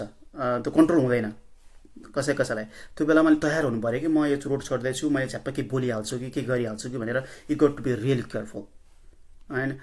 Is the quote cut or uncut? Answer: uncut